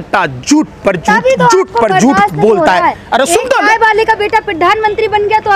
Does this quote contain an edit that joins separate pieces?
no; 0 cuts

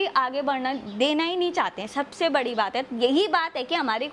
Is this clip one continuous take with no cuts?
yes; 0 cuts

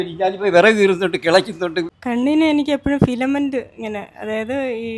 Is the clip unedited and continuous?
no; 1 cut; at 2.0 s

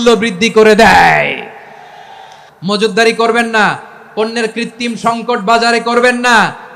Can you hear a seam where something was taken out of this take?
yes; 1 cut; at 2.4 s

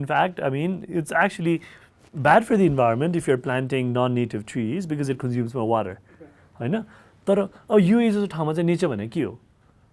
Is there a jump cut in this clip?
no; 0 cuts

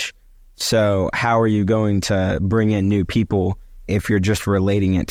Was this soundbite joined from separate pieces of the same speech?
no; 0 cuts

